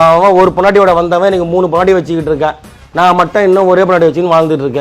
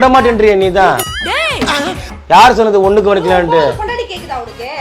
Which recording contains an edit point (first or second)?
second